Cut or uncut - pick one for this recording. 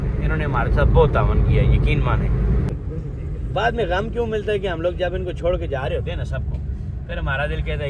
cut